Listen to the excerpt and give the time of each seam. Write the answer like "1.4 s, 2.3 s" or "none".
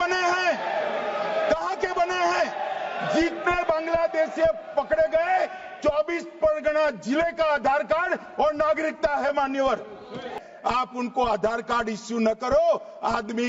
10.4 s